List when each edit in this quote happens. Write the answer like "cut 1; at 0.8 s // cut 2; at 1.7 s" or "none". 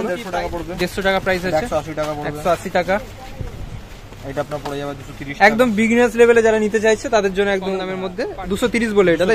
none